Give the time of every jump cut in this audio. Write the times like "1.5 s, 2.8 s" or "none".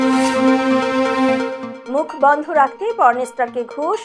none